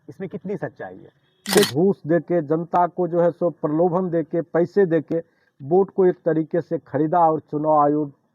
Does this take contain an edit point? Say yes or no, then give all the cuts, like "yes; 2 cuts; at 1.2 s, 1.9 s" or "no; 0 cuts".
yes; 1 cut; at 1.7 s